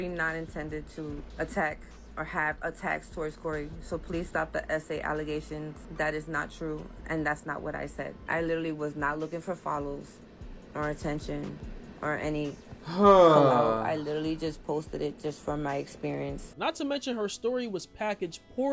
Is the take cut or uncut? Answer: cut